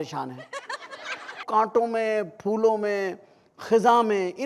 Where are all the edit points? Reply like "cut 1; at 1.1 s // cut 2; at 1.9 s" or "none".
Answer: cut 1; at 1.4 s